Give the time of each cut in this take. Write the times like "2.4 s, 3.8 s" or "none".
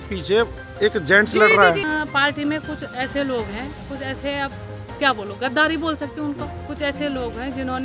1.8 s